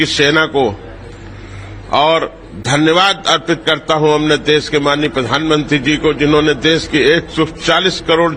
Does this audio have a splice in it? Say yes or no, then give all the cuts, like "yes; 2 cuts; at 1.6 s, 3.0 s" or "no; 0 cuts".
no; 0 cuts